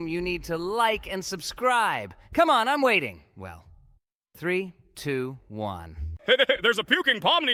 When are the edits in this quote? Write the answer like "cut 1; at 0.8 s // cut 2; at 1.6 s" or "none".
none